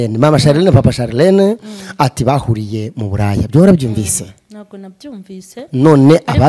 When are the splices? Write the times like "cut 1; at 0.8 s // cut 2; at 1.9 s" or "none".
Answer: none